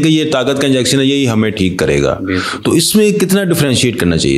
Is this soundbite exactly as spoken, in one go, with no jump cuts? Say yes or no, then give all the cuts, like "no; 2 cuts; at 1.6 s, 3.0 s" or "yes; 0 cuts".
yes; 0 cuts